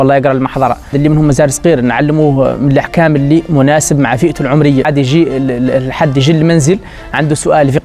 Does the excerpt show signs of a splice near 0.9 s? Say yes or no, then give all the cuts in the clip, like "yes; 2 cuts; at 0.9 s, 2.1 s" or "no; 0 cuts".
yes; 2 cuts; at 0.9 s, 4.9 s